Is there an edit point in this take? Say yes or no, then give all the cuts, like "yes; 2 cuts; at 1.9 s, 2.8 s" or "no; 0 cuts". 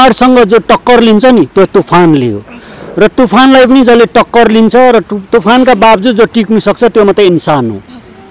no; 0 cuts